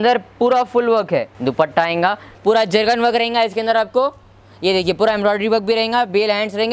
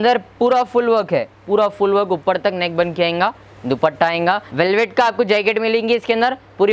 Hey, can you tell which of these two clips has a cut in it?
first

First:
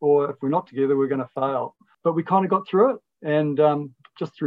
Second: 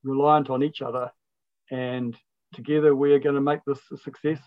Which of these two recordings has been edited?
first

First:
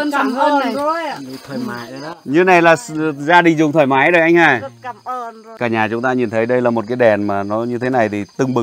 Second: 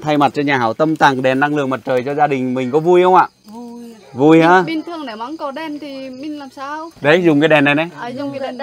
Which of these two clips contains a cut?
first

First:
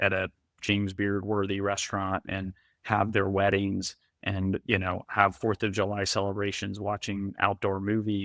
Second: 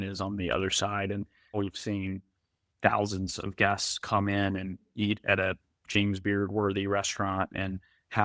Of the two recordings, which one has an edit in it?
second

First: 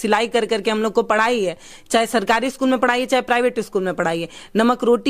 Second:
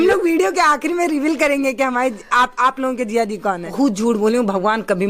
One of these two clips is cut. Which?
second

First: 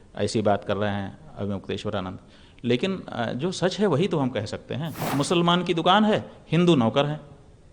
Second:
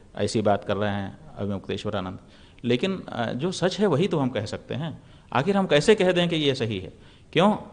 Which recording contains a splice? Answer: first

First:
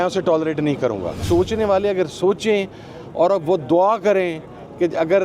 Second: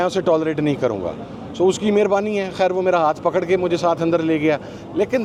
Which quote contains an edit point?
first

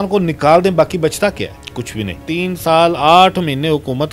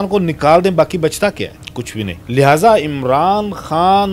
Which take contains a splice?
first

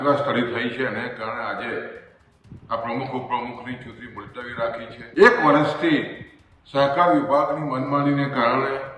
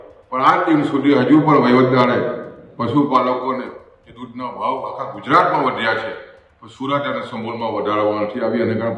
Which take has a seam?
first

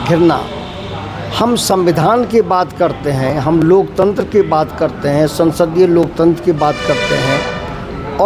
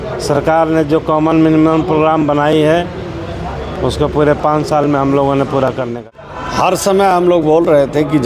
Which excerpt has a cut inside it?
second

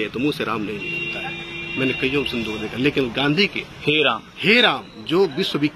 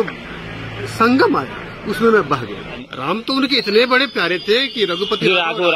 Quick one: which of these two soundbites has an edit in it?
second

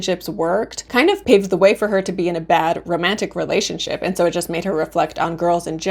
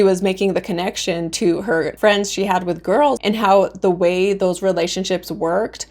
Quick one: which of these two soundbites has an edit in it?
second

